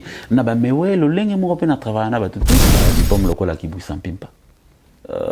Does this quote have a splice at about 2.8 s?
yes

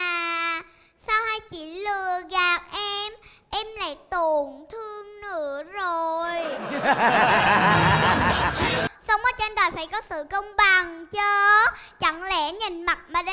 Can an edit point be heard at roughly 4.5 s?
no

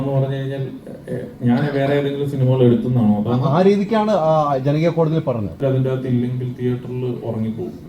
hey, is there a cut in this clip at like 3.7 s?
no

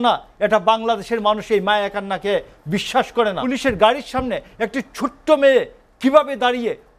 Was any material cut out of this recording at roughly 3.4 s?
yes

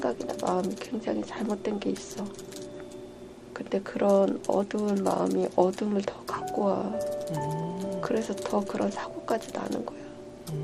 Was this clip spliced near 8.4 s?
no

